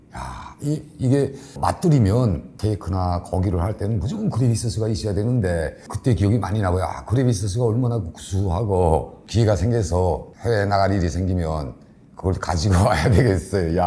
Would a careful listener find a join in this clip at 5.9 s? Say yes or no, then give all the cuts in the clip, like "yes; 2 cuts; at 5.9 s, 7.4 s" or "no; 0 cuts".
yes; 3 cuts; at 1.5 s, 5.9 s, 9.2 s